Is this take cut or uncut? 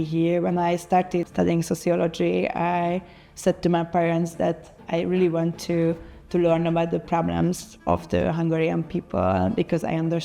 cut